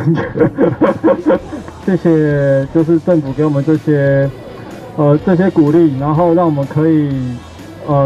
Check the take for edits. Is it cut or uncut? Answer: cut